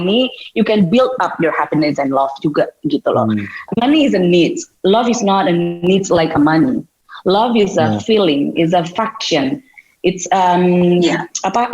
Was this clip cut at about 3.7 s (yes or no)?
yes